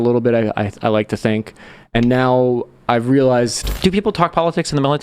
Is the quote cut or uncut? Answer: cut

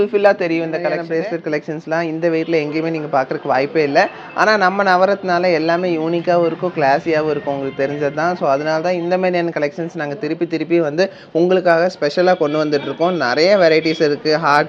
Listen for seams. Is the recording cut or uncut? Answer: cut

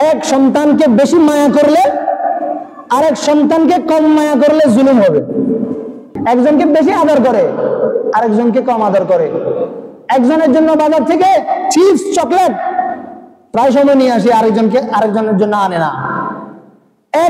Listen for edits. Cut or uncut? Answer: cut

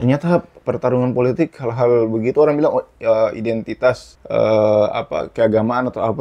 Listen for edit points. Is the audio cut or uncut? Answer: cut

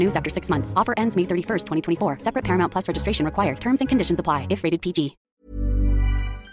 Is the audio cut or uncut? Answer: cut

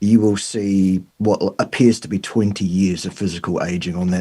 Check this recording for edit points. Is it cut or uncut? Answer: cut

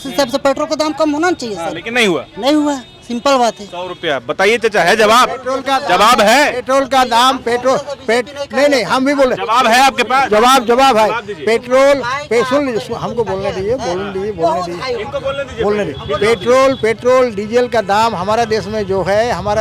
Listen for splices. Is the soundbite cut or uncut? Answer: uncut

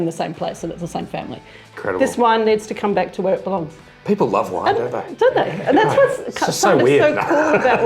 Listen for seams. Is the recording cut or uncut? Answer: cut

